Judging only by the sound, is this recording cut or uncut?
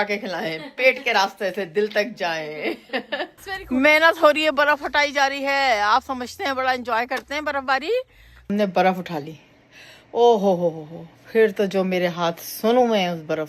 cut